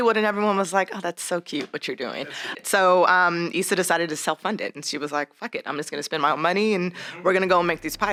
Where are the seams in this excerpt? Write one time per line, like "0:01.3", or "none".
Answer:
0:02.5